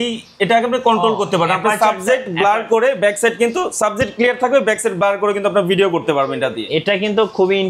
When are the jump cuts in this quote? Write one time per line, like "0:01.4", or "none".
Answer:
none